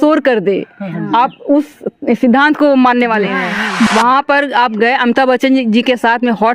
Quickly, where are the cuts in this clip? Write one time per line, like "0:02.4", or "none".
0:03.9